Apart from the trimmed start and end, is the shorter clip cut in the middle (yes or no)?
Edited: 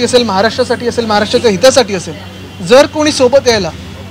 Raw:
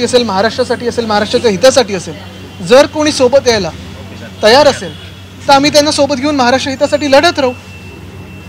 no